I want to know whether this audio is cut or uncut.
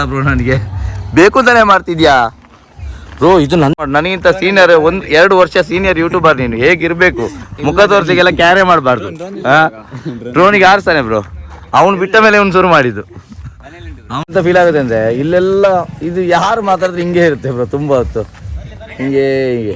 cut